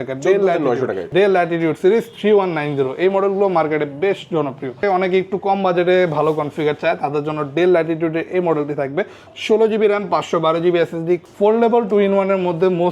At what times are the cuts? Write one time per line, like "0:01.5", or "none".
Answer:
0:01.0
0:04.8
0:11.2